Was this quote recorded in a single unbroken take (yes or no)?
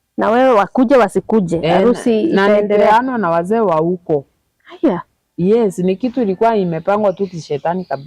yes